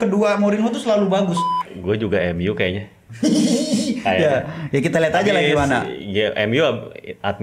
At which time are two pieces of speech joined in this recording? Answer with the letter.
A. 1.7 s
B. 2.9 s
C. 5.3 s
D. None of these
A